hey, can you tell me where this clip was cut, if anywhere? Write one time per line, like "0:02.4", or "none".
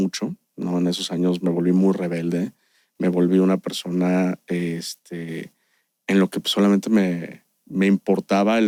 none